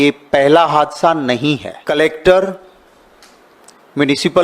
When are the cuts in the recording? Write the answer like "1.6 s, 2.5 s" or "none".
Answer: 1.7 s

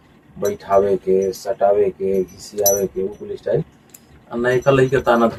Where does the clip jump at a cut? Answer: none

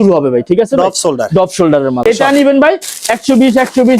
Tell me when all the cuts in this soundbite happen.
2.0 s

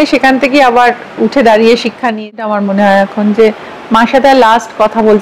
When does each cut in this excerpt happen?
2.5 s

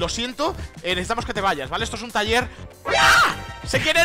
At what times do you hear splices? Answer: 2.6 s

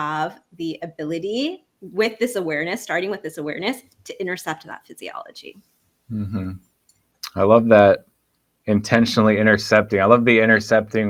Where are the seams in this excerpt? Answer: none

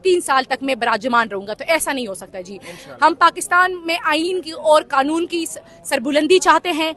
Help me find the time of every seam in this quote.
none

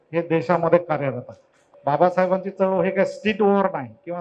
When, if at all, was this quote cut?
1.7 s

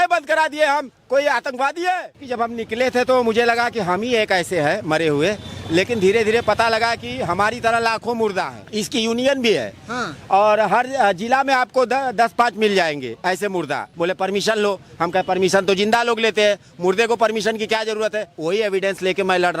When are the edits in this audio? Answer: 2.2 s, 8.6 s, 13.9 s, 18.3 s

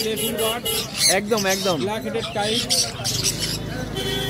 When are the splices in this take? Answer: none

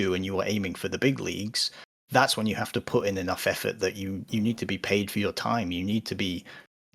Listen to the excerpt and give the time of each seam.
none

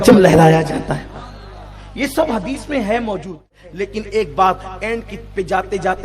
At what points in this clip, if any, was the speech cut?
3.6 s

